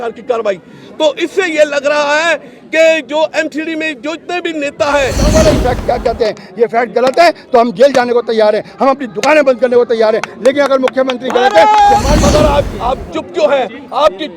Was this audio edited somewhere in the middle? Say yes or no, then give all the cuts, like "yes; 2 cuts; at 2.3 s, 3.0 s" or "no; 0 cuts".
yes; 2 cuts; at 5.3 s, 12.1 s